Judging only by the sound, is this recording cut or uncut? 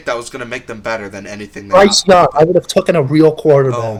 uncut